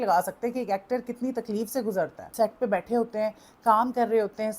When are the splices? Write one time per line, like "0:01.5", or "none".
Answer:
0:02.2